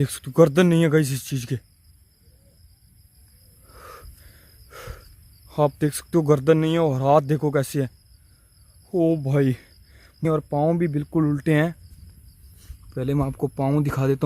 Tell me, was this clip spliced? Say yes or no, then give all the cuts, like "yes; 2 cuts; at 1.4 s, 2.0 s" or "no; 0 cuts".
yes; 1 cut; at 10.2 s